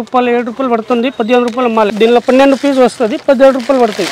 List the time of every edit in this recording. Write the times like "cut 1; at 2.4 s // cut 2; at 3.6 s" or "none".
cut 1; at 1.9 s